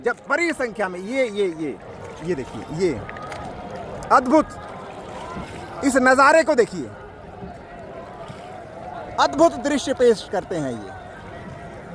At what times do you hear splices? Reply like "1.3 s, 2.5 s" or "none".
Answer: none